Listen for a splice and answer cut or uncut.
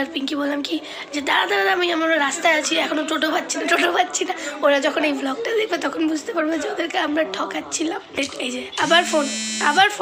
cut